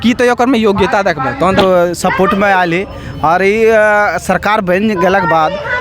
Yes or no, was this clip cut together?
yes